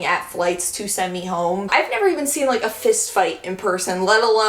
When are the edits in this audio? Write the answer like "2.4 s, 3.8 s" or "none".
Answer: 1.7 s